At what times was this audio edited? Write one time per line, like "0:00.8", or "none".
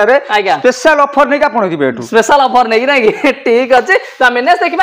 none